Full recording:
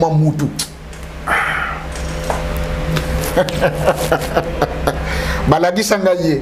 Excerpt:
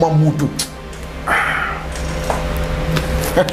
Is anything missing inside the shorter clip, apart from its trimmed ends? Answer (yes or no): no